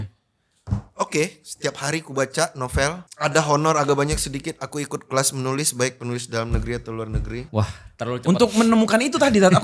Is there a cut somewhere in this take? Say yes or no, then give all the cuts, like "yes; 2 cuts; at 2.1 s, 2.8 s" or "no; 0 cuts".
yes; 2 cuts; at 3.1 s, 7.4 s